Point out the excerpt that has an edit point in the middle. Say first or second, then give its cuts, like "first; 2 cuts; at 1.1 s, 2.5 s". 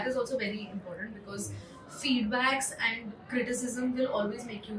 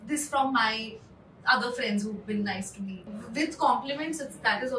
second; 1 cut; at 3.2 s